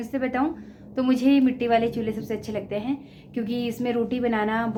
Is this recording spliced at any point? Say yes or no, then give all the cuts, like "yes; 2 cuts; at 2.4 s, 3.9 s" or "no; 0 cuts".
no; 0 cuts